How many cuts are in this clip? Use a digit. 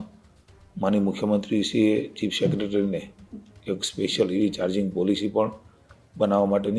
0